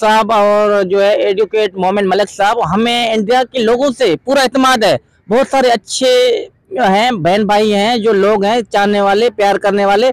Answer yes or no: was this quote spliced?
no